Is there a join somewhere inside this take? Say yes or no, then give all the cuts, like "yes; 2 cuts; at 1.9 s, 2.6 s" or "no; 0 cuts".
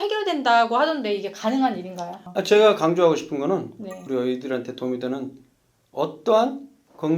yes; 1 cut; at 2.2 s